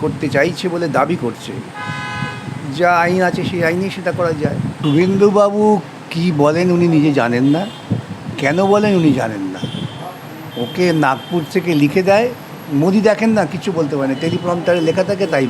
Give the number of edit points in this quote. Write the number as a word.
one